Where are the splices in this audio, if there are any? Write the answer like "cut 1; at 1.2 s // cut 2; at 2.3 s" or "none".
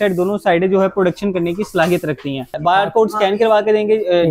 cut 1; at 2.5 s